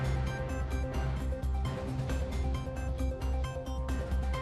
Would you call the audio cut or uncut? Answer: uncut